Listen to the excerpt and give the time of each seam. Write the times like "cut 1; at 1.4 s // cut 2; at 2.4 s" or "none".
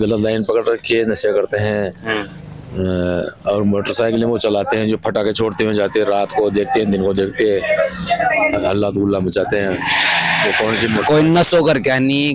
none